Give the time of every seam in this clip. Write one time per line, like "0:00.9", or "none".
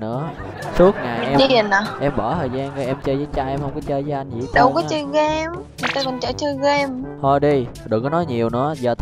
0:07.1